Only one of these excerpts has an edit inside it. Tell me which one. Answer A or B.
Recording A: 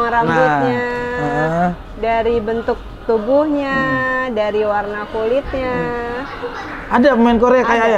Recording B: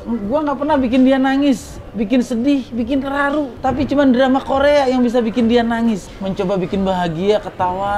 B